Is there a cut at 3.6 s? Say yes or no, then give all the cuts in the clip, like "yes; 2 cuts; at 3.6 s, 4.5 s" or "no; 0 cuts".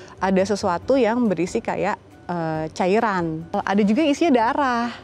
yes; 1 cut; at 3.6 s